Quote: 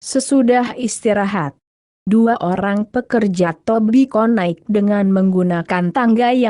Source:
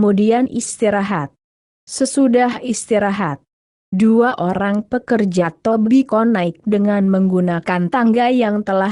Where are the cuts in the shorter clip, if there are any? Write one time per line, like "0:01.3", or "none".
0:02.2

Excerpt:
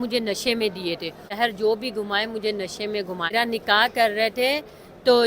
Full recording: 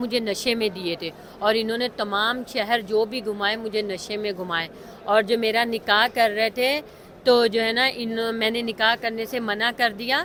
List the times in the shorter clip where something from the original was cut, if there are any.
0:01.3
0:03.3

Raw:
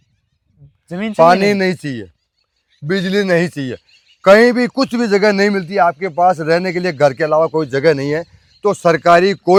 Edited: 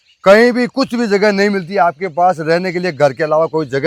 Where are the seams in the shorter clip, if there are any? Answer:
none

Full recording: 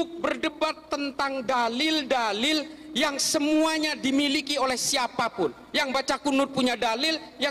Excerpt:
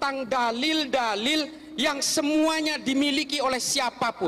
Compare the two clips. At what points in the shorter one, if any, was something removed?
none

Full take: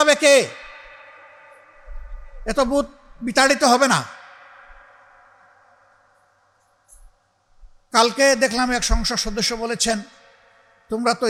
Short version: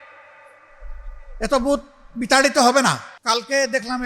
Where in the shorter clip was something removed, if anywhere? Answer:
0:03.1

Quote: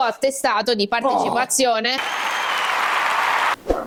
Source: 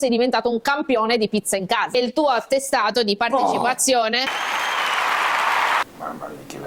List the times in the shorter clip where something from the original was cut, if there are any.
none

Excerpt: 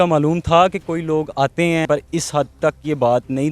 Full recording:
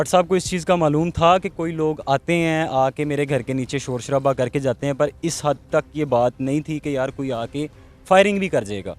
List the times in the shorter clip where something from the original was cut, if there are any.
0:01.9

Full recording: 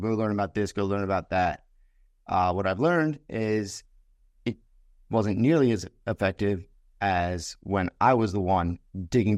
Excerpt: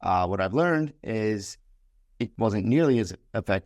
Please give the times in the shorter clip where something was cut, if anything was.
0:02.3

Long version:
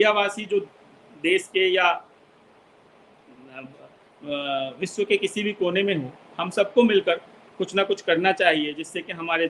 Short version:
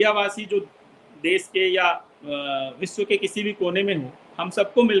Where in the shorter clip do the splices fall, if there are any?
0:02.1

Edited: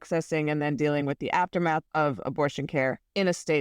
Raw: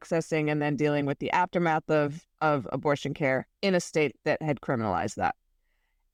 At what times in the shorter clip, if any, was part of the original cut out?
0:01.8

